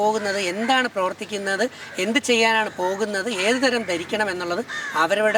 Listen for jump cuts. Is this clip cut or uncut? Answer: uncut